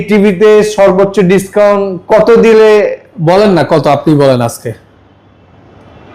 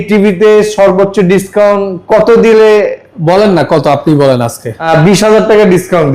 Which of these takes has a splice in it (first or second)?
second